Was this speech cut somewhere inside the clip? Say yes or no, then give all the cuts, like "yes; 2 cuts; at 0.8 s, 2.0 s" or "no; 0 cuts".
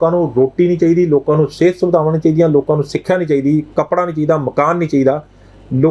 no; 0 cuts